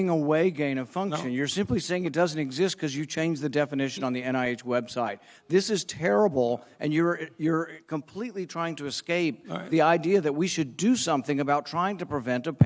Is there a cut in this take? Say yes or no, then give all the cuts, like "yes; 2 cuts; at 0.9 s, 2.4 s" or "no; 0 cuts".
no; 0 cuts